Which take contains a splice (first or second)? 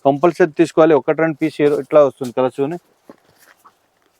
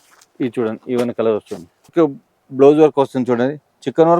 second